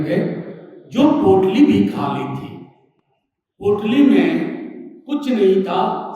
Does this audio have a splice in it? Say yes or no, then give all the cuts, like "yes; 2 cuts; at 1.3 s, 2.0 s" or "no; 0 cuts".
no; 0 cuts